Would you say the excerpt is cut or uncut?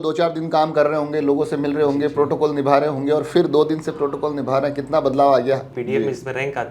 cut